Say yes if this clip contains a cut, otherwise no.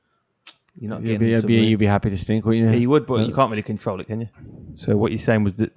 yes